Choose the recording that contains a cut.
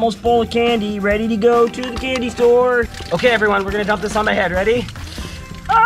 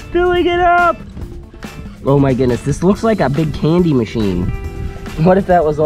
first; 1 cut; at 3.0 s

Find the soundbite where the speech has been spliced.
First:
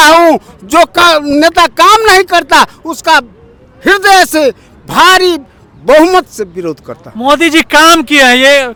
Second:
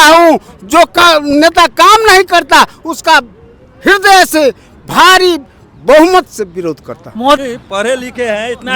second; 1 cut; at 7.4 s

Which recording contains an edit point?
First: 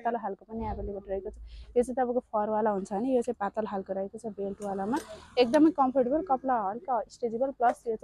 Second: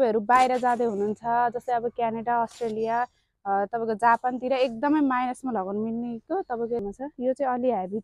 second; 1 cut; at 6.9 s

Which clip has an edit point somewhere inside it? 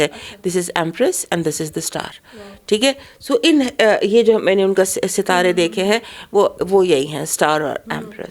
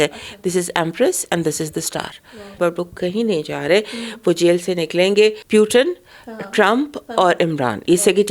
second; 2 cuts; at 2.6 s, 5.4 s

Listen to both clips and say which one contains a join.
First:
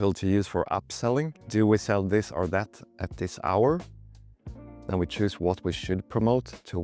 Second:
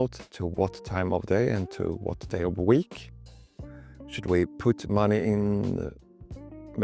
first; 1 cut; at 1.4 s

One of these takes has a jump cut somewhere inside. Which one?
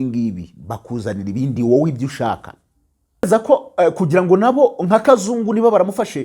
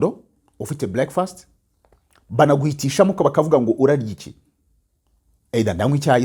first; 1 cut; at 3.3 s

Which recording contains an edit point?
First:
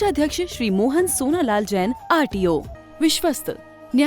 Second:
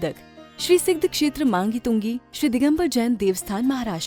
first; 1 cut; at 2.8 s

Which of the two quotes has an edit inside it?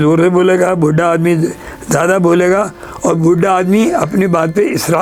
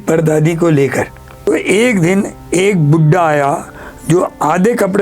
second; 1 cut; at 1.5 s

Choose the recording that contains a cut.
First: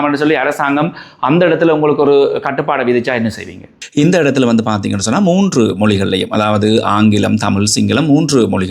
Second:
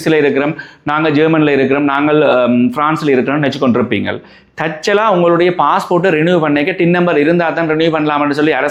first; 1 cut; at 3.8 s

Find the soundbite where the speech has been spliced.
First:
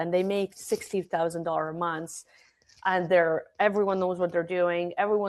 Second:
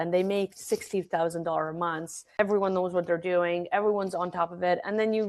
second; 1 cut; at 2.4 s

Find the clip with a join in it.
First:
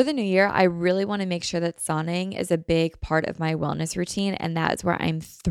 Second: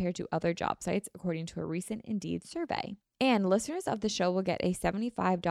second; 1 cut; at 3.0 s

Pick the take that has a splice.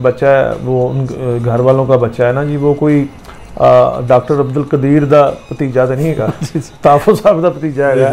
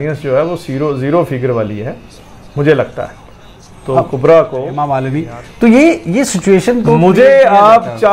second; 1 cut; at 5.0 s

